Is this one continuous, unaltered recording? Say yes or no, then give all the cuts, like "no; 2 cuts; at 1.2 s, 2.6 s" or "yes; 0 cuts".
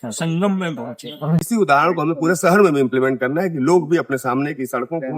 no; 1 cut; at 1.5 s